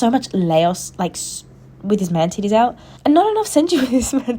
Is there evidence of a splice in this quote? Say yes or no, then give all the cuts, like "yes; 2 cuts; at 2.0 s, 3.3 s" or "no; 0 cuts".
yes; 1 cut; at 2.9 s